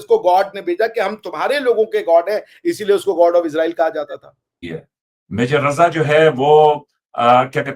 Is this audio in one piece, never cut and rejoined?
no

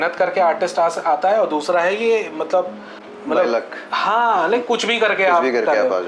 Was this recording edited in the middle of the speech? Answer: no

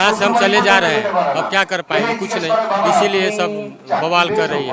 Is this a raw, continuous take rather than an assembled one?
yes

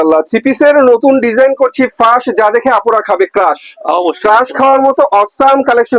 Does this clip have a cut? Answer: no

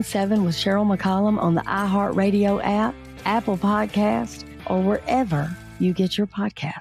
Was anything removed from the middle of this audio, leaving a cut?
no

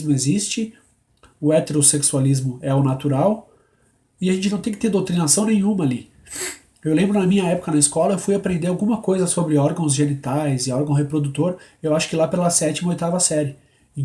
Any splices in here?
no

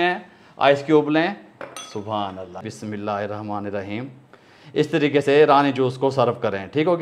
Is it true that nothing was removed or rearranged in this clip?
no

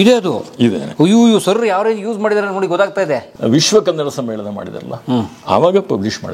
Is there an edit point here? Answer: yes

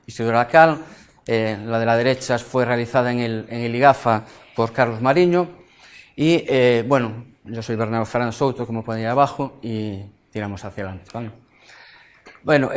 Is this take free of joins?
no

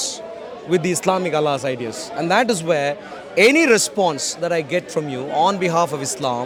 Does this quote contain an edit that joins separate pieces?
no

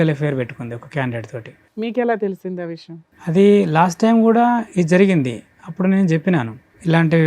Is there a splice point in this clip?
no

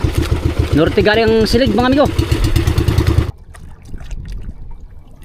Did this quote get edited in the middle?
yes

